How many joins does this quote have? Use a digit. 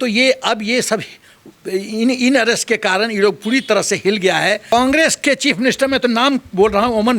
1